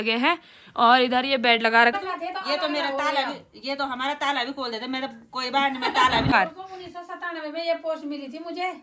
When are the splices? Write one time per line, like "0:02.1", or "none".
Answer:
0:02.0
0:06.3